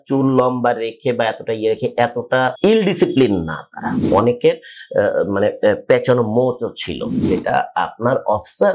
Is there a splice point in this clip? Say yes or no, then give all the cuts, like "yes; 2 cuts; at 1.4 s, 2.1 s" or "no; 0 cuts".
yes; 3 cuts; at 2.5 s, 4.0 s, 7.2 s